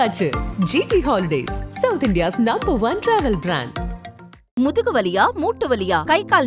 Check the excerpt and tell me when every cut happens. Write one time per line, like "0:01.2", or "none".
none